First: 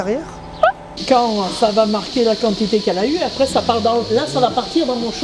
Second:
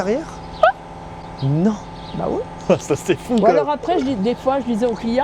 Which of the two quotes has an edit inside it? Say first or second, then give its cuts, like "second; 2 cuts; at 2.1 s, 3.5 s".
first; 1 cut; at 0.9 s